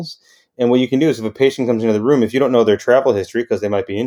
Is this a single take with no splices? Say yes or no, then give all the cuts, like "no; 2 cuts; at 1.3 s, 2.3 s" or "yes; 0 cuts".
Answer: yes; 0 cuts